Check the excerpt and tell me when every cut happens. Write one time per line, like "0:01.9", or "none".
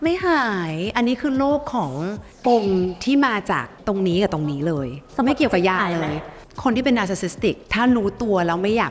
none